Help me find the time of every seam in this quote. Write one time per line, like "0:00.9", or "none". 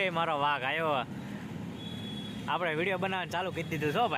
none